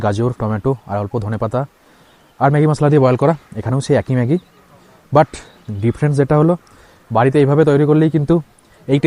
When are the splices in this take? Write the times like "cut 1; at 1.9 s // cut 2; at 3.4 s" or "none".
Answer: none